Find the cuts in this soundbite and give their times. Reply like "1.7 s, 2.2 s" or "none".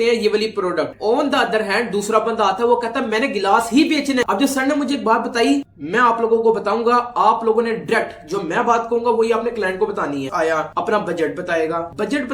4.2 s, 10.3 s